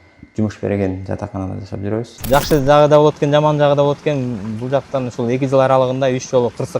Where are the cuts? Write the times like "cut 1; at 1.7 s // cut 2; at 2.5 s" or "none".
cut 1; at 2.2 s